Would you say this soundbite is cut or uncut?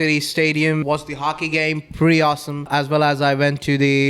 cut